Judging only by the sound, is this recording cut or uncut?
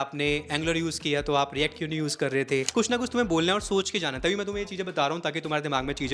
cut